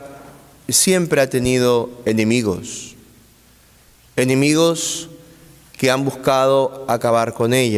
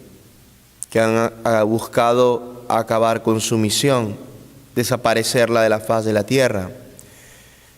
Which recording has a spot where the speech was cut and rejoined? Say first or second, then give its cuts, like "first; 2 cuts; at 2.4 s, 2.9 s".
second; 1 cut; at 2.8 s